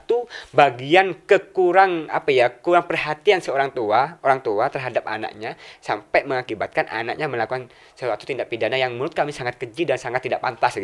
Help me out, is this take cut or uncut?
uncut